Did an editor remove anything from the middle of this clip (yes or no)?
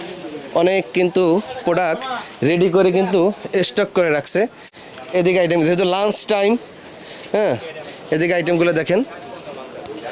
no